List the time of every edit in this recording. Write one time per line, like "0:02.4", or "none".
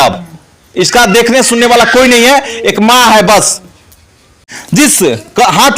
0:04.4